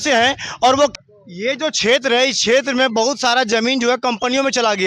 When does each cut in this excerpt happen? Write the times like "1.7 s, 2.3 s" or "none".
0.9 s

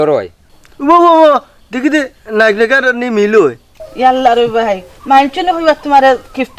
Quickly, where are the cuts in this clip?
3.8 s

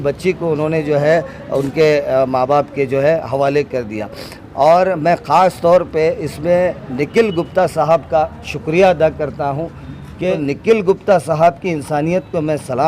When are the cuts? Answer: 10.3 s

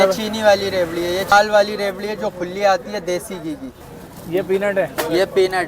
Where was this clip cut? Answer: 1.3 s, 3.7 s

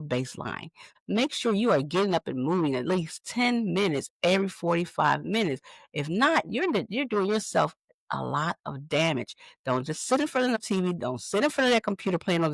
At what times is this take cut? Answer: 0.9 s

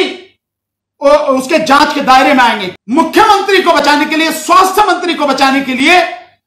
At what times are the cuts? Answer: 2.6 s

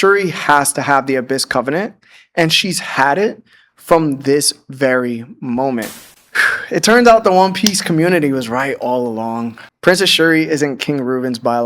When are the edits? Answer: 6.0 s

